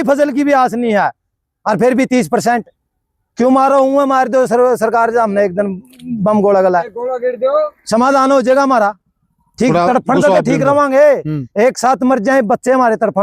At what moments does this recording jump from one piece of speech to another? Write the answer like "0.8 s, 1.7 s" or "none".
none